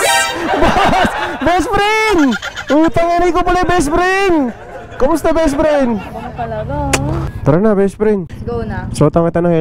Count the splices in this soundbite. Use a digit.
2